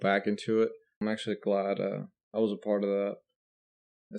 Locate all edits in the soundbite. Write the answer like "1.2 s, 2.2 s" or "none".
1.0 s